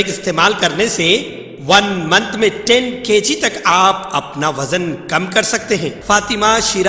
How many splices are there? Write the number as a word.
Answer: one